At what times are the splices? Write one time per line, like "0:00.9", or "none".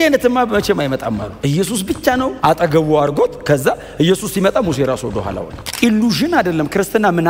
0:01.3
0:02.3
0:05.7